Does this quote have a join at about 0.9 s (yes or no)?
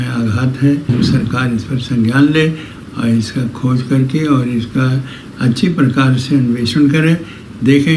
yes